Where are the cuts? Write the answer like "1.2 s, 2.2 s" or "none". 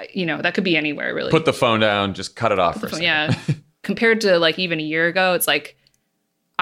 3.8 s

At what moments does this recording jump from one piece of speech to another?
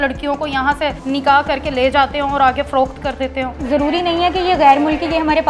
1.0 s, 3.6 s

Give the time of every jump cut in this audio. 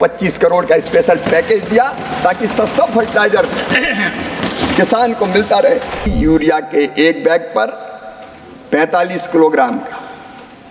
6.1 s

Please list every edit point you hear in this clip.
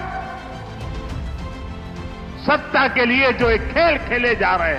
none

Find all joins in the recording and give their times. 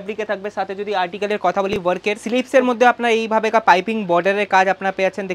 2.2 s

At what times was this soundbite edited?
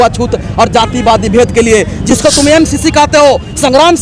none

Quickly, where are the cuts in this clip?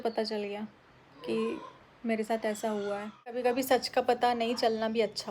3.4 s

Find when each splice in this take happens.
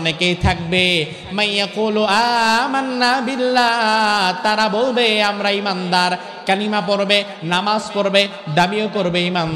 none

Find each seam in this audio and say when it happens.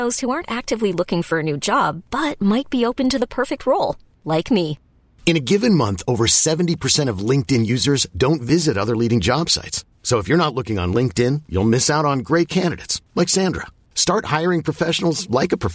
none

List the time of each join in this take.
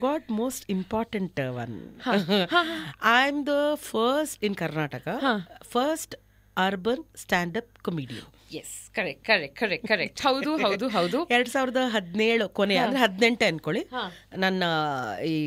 none

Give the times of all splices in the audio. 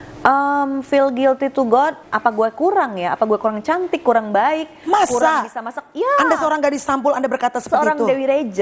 2.1 s

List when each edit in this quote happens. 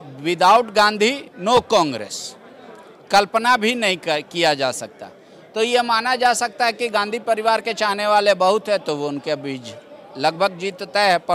none

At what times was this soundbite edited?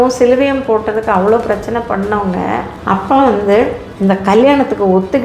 2.7 s

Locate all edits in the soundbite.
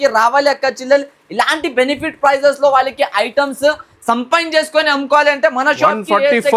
none

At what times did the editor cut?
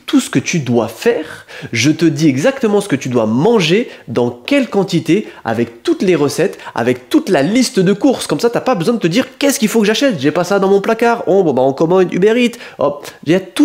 none

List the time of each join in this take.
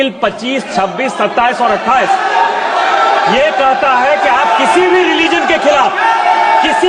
none

